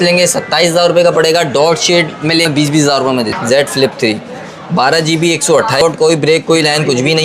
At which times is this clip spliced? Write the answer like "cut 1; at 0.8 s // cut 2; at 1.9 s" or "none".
cut 1; at 2.4 s // cut 2; at 3.4 s // cut 3; at 5.8 s